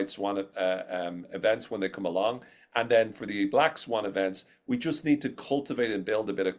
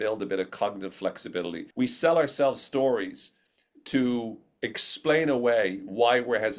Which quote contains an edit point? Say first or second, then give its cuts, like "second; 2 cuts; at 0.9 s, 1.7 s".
second; 1 cut; at 1.6 s